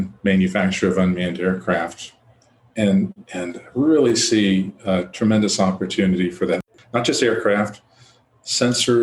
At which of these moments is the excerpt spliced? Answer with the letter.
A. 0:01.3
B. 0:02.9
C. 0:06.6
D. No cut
C